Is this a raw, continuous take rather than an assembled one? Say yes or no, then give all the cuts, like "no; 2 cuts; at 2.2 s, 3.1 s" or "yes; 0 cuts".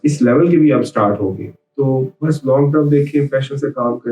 no; 1 cut; at 1.6 s